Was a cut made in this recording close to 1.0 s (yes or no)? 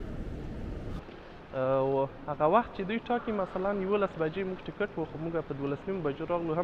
yes